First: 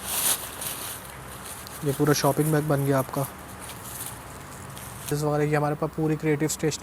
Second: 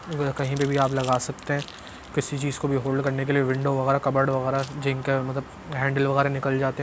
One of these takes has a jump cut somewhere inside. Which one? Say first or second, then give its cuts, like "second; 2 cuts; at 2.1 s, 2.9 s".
first; 1 cut; at 5.1 s